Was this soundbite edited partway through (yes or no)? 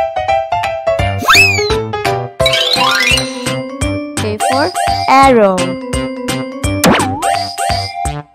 yes